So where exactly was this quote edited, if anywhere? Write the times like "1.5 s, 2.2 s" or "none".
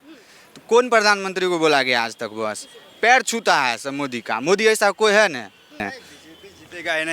5.9 s